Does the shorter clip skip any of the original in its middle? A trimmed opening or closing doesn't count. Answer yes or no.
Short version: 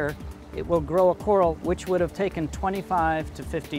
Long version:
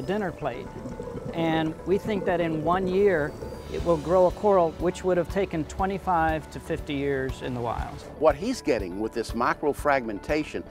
no